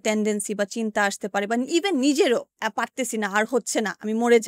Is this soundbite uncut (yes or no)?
no